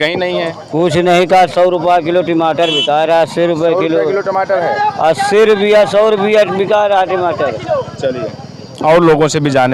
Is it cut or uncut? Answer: uncut